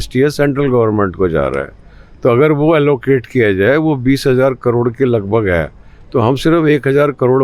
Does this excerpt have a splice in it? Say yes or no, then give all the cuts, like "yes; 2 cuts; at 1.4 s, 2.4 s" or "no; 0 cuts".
no; 0 cuts